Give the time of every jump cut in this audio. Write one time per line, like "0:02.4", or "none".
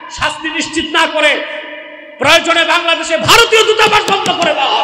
none